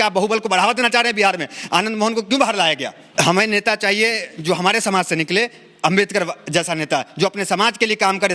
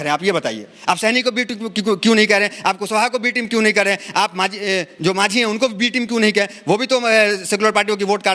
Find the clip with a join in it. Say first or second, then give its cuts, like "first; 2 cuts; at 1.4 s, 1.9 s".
first; 1 cut; at 3.0 s